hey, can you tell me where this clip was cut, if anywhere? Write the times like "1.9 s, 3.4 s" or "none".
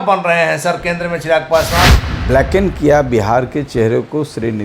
1.9 s